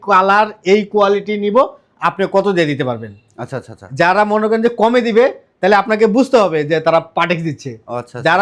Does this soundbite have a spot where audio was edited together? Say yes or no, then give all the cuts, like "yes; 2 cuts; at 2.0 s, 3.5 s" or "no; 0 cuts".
no; 0 cuts